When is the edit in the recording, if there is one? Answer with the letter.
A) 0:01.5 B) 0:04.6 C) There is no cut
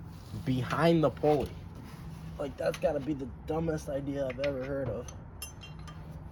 C